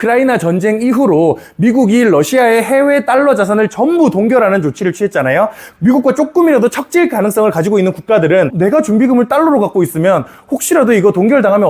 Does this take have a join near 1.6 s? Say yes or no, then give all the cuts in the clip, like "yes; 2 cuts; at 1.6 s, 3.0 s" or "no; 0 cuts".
no; 2 cuts; at 5.7 s, 8.5 s